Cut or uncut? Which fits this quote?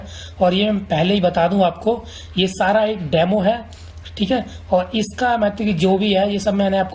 uncut